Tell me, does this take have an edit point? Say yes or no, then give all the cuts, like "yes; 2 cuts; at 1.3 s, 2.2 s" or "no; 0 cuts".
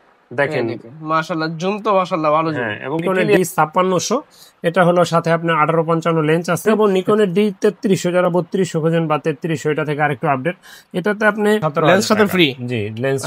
yes; 3 cuts; at 3.2 s, 6.8 s, 11.7 s